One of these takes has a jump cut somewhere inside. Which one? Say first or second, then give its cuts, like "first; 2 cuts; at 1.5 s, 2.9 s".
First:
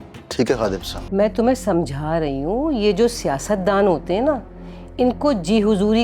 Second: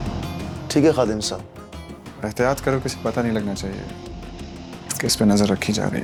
first; 1 cut; at 0.9 s